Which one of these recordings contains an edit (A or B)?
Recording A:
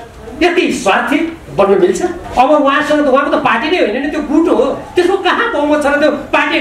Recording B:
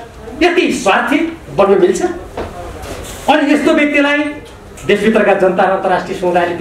A